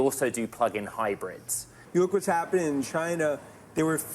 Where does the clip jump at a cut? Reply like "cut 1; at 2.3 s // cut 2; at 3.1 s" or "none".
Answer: cut 1; at 1.7 s